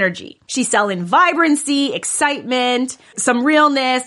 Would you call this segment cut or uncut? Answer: cut